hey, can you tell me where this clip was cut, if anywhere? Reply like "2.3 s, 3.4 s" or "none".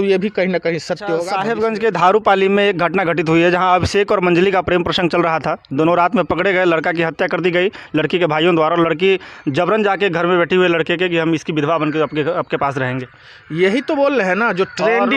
1.4 s